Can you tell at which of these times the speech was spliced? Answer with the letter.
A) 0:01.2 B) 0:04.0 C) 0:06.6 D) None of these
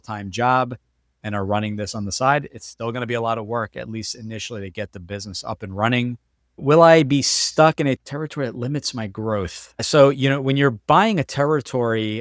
C